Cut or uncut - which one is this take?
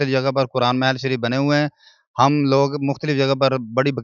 uncut